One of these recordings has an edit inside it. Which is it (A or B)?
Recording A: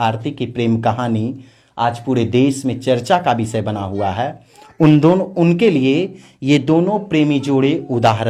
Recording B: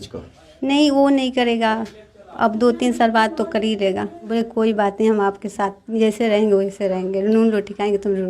B